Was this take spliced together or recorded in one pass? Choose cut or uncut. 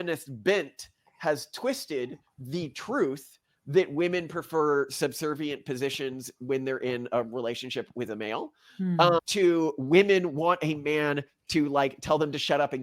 uncut